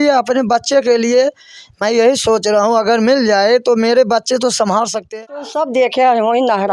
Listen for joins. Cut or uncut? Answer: cut